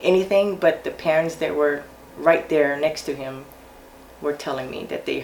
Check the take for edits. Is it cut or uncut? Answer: uncut